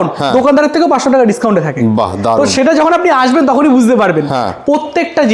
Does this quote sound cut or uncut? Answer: uncut